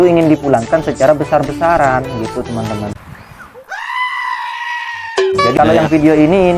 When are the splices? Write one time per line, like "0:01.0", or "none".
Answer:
0:05.5